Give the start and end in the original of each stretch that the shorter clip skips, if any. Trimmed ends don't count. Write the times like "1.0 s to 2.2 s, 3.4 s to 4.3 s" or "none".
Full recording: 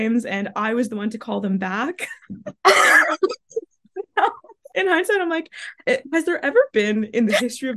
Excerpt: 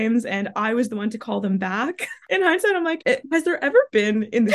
2.1 s to 4.5 s, 5.4 s to 5.8 s